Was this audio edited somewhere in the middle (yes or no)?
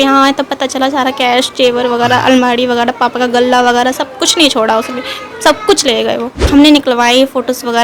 yes